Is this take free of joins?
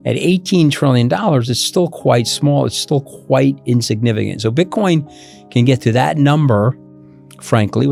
yes; 0 cuts

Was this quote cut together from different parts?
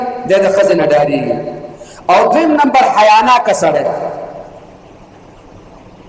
no; 0 cuts

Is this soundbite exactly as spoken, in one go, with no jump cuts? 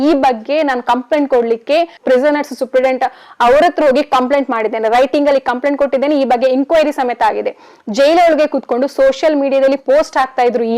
no; 1 cut; at 2.0 s

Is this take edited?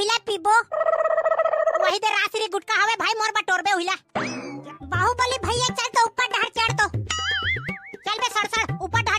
yes; 1 cut; at 4.8 s

